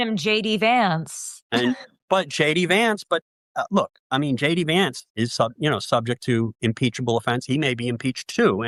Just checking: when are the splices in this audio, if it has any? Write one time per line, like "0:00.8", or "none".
none